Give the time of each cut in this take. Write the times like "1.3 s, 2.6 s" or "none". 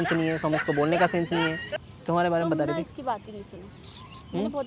1.7 s